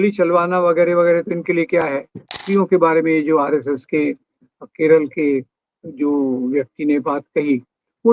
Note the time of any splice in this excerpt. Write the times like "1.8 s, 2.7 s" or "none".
2.4 s

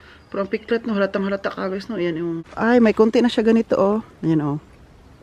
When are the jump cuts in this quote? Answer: 2.4 s

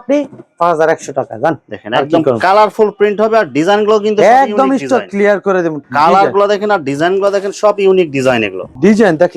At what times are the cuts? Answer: 5.8 s

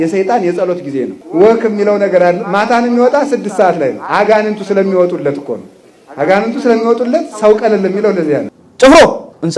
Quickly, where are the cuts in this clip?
1.2 s, 8.5 s

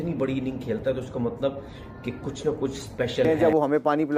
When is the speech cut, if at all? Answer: 3.3 s

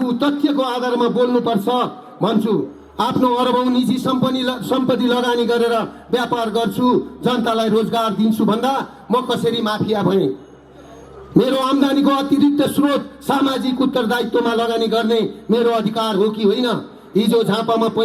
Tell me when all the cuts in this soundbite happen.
2.8 s

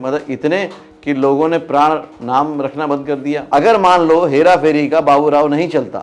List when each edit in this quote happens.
3.4 s

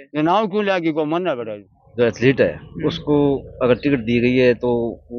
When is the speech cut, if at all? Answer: 1.8 s

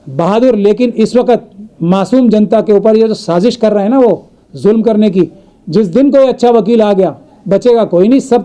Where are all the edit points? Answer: none

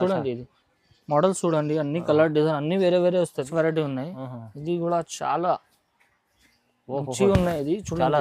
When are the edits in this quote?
3.5 s

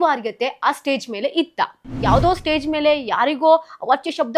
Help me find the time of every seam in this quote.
1.9 s

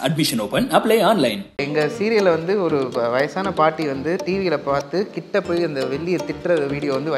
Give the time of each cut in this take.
1.6 s

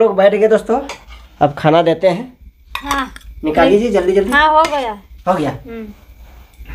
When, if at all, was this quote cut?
none

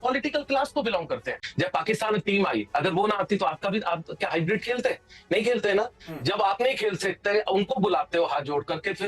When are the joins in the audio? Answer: 1.4 s

